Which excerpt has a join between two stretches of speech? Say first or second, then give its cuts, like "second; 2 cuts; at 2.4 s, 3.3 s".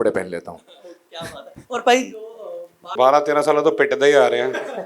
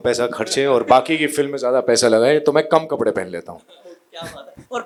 first; 1 cut; at 2.9 s